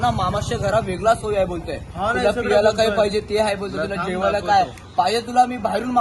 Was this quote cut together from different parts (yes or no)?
yes